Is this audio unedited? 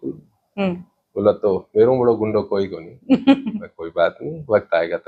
yes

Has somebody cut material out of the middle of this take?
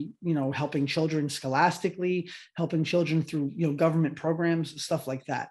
no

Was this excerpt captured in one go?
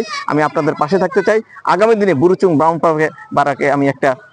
yes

